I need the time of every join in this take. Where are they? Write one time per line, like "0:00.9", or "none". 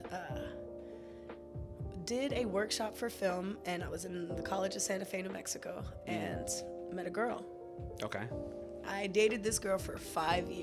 none